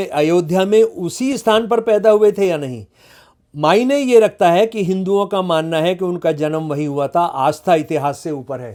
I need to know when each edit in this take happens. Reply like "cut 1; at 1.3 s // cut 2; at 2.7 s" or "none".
none